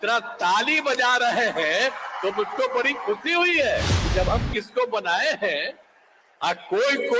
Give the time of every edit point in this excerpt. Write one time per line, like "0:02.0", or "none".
0:04.0

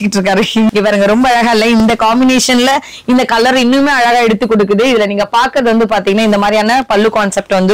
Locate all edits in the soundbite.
none

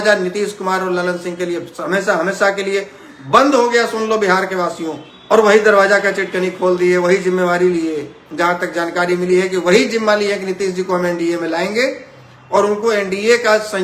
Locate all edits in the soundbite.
0:05.1

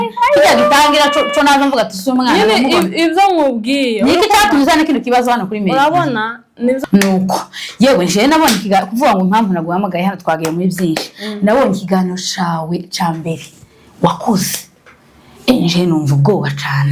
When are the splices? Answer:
0:06.8

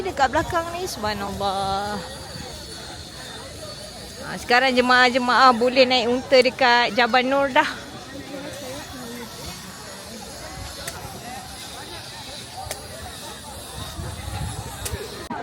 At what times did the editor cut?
none

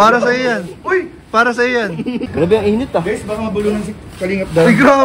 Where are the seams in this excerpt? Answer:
0:02.3

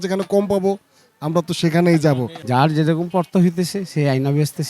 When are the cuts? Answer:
0:02.3

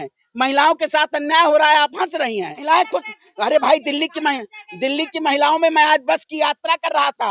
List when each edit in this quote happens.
0:02.6

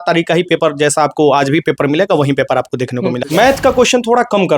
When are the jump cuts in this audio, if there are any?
0:03.2

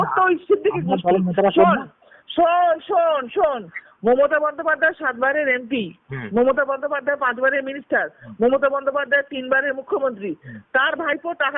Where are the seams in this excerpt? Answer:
none

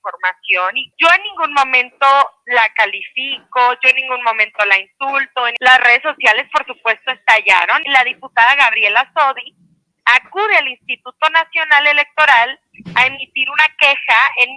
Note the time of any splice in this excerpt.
0:00.8
0:05.5
0:07.8

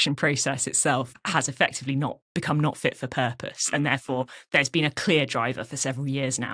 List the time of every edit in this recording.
0:01.1

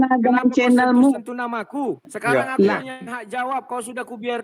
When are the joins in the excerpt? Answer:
0:02.1

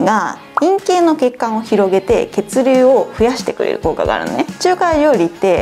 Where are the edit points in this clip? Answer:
0:04.5

